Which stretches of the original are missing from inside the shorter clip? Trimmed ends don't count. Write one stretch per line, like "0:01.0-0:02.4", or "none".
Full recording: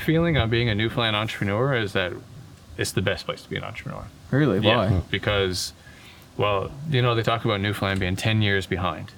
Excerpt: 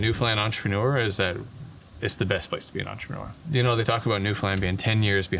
0:04.2-0:06.8